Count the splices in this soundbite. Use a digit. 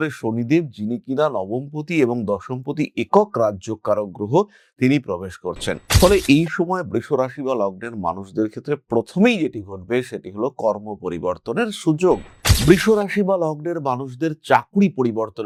0